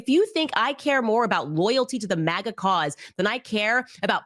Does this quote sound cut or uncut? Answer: uncut